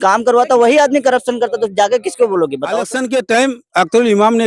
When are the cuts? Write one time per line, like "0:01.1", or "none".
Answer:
0:02.9